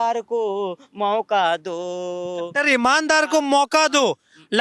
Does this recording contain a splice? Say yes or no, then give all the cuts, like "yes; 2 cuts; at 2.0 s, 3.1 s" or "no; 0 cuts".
no; 0 cuts